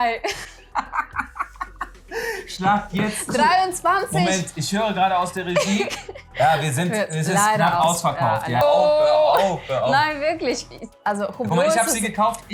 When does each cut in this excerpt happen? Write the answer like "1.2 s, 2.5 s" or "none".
8.6 s